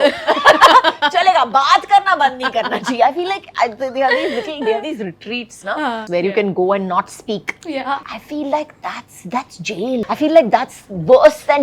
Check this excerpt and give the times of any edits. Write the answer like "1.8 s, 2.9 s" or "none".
6.0 s, 10.0 s